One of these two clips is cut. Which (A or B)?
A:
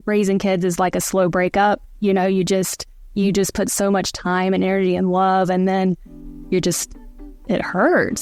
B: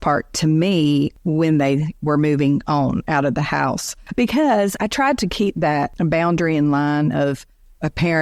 B